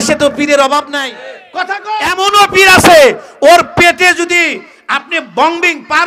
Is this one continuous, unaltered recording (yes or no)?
no